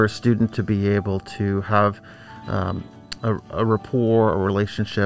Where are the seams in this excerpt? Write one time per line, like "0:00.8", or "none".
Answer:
none